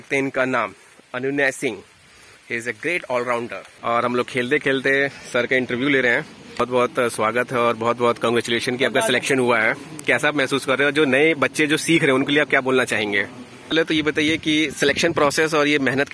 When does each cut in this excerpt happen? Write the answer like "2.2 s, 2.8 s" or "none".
3.7 s, 6.6 s, 13.7 s